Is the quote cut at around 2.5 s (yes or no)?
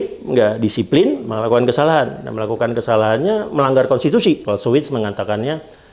no